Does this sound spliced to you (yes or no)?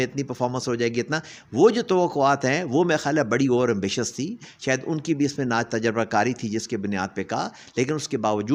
no